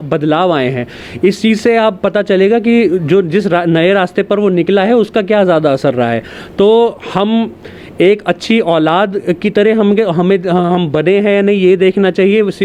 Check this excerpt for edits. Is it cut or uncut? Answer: uncut